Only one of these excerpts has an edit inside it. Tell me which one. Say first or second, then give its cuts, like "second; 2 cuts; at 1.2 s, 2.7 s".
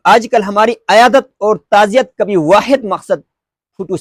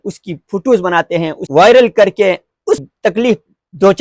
second; 2 cuts; at 1.4 s, 2.8 s